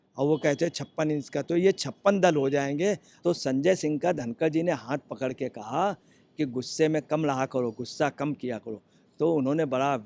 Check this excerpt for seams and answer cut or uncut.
cut